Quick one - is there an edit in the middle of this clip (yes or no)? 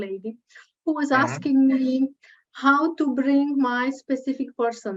no